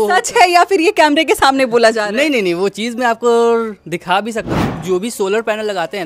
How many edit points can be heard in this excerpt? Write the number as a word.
one